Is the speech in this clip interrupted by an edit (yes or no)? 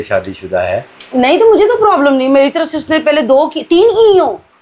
no